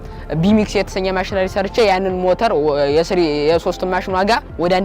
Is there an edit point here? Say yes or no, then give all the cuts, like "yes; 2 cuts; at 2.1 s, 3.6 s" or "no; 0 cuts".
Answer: no; 0 cuts